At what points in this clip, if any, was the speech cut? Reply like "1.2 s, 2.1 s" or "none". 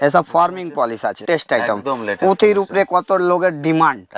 1.2 s